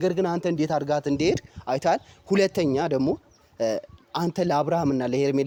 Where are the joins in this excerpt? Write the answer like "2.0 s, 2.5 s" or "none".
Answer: none